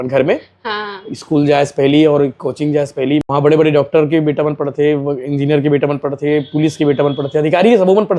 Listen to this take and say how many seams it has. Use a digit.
1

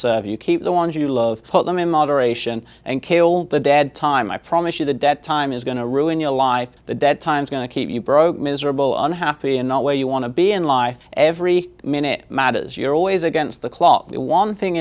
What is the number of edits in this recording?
3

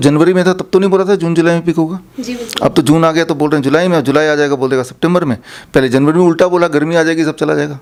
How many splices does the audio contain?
0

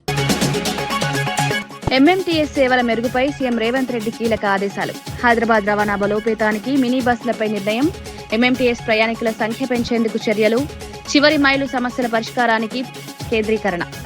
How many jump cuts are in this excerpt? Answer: 1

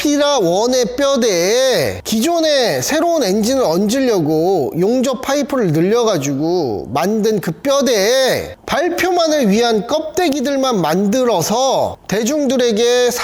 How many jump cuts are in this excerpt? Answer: 0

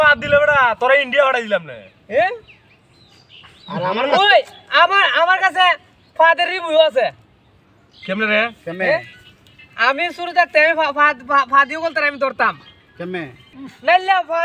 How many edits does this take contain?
1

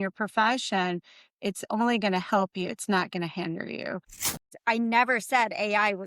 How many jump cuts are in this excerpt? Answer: 1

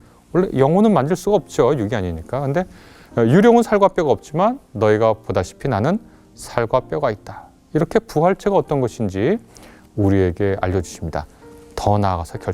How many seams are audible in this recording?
0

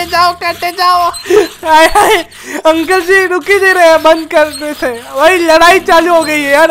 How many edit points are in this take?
0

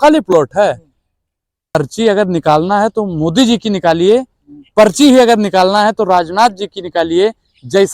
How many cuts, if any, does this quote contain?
1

